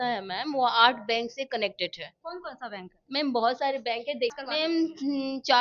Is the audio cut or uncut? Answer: cut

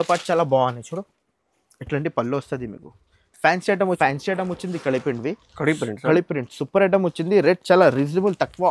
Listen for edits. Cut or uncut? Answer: cut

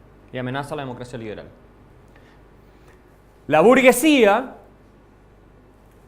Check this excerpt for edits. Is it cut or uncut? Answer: cut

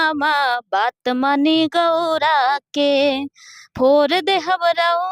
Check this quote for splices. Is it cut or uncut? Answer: uncut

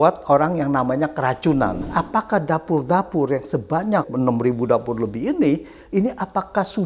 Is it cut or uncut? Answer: cut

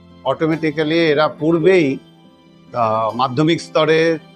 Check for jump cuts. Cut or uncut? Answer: uncut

